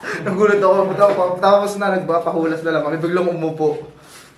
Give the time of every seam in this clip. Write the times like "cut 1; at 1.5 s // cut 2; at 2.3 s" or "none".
none